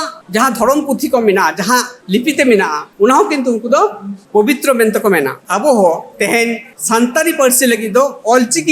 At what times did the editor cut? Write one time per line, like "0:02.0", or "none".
0:05.4
0:06.6